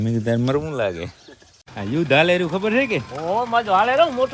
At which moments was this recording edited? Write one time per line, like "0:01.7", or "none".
0:01.3